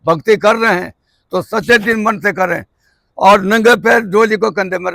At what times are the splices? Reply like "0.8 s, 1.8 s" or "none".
none

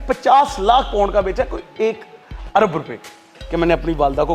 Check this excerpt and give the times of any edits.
none

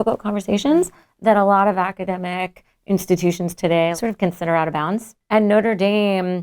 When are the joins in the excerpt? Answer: 3.9 s, 5.1 s

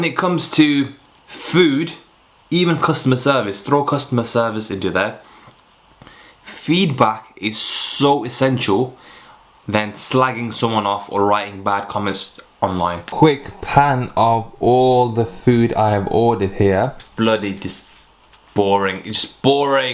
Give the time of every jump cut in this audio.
13.0 s, 17.0 s

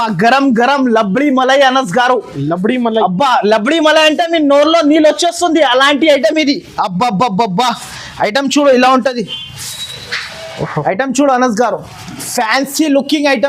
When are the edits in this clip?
none

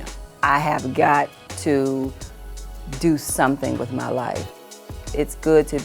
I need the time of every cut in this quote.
4.9 s

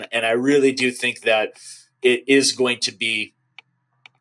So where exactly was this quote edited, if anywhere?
none

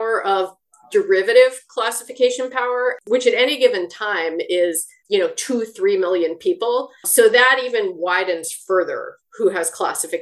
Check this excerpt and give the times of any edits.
3.0 s, 4.9 s, 7.1 s

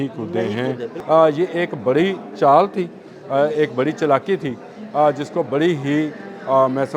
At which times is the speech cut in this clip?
0.9 s

